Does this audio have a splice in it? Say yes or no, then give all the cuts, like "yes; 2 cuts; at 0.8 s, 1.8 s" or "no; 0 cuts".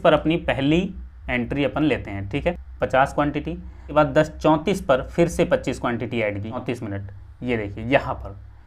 yes; 3 cuts; at 2.7 s, 3.8 s, 6.6 s